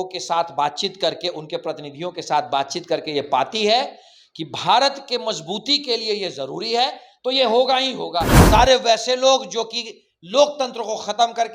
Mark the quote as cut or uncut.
cut